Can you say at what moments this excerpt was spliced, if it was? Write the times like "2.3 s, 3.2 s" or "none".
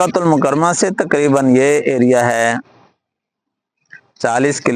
1.9 s